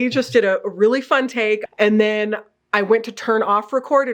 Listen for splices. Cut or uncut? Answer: cut